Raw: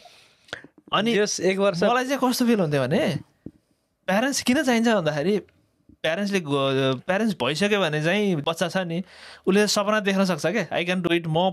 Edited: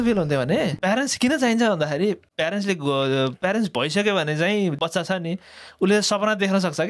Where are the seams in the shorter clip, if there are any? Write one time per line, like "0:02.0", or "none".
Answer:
0:00.8
0:02.3